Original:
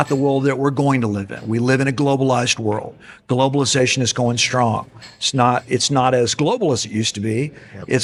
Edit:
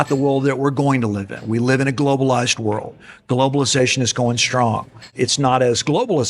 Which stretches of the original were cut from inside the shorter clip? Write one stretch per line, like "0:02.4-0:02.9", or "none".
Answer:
0:05.1-0:05.6